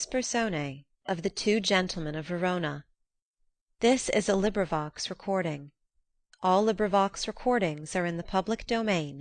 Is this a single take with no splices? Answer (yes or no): no